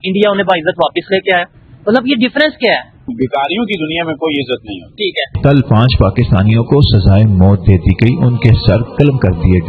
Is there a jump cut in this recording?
yes; 2 cuts; at 3.1 s, 5.4 s

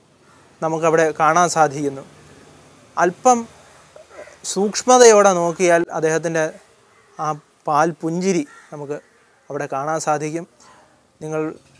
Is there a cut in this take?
no; 0 cuts

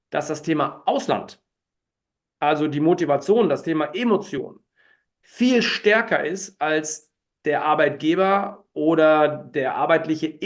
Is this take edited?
no; 0 cuts

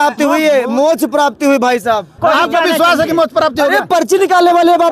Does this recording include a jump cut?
yes; 1 cut; at 2.1 s

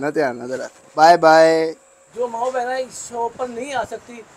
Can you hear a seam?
yes; 2 cuts; at 0.9 s, 2.0 s

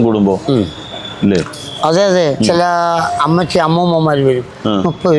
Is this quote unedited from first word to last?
no; 1 cut; at 2.4 s

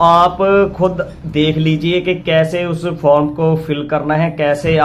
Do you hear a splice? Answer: no; 0 cuts

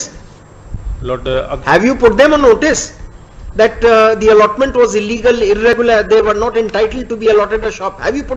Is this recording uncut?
yes; 0 cuts

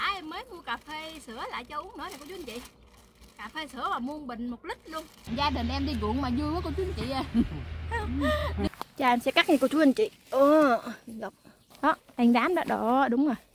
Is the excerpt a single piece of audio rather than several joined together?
no; 3 cuts; at 5.2 s, 8.6 s, 11.8 s

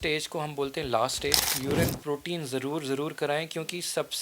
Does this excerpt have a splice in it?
yes; 1 cut; at 1.5 s

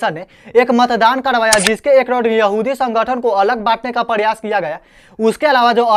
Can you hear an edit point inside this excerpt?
no; 0 cuts

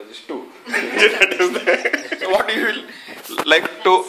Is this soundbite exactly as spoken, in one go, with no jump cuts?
no; 1 cut; at 2.1 s

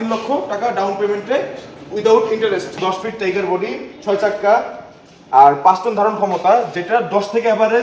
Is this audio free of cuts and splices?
no; 1 cut; at 2.8 s

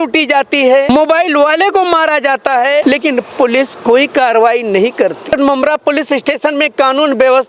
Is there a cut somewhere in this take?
yes; 3 cuts; at 0.9 s, 2.8 s, 5.3 s

